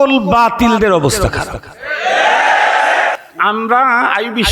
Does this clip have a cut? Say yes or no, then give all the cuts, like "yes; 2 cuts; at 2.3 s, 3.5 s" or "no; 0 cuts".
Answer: yes; 1 cut; at 3.2 s